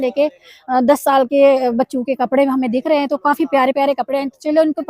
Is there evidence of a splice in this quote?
no; 0 cuts

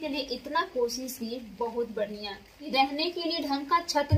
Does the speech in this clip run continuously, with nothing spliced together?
no; 1 cut; at 2.7 s

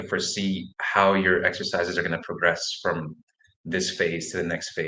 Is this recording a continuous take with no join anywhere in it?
yes; 0 cuts

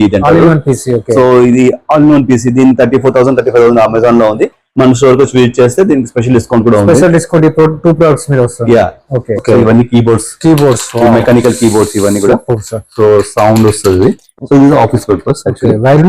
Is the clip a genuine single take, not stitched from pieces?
no; 1 cut; at 9.4 s

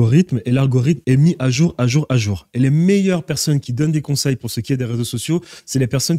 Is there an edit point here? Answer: yes; 1 cut; at 1.0 s

